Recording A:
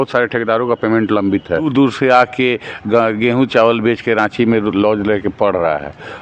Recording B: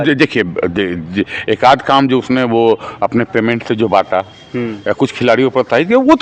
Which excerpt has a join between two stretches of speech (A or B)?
A